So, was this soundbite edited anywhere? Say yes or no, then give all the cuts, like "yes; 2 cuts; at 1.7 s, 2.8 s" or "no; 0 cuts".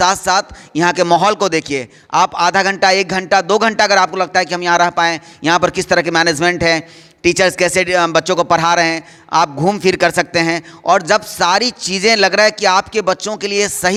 no; 0 cuts